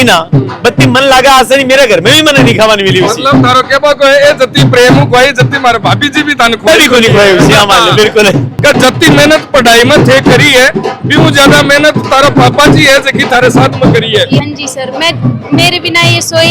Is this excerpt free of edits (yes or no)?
no